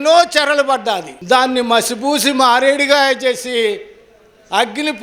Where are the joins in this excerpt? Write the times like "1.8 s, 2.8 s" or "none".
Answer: none